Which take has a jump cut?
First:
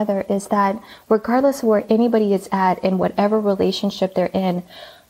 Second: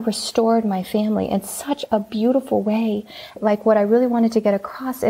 second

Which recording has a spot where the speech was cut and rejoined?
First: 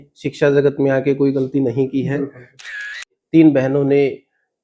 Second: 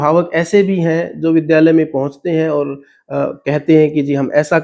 first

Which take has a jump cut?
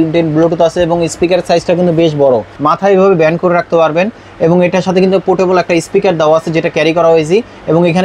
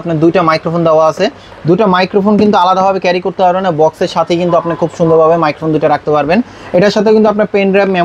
first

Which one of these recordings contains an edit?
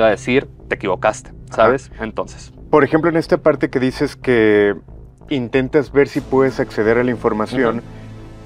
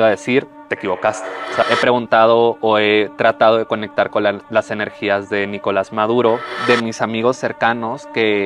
second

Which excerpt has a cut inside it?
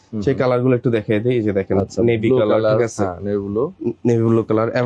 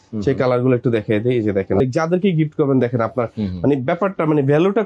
second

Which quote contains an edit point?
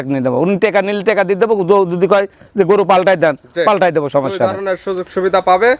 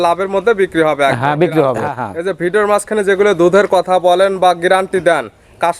second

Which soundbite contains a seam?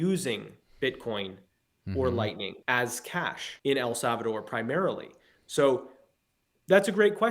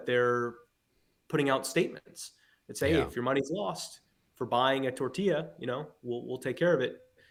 first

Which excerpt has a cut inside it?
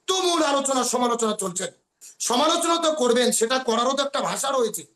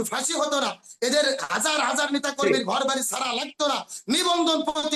first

